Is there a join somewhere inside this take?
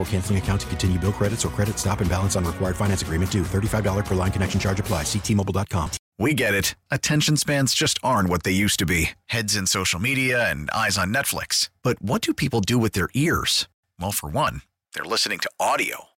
yes; 1 cut; at 6.0 s

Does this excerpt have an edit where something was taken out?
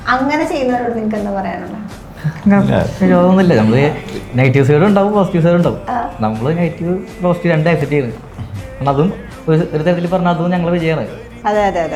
no; 0 cuts

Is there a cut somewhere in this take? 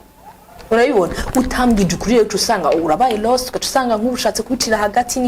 no; 0 cuts

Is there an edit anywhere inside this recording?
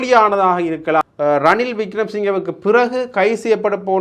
yes; 1 cut; at 1.0 s

